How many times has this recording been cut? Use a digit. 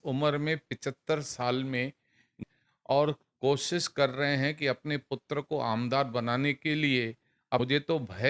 2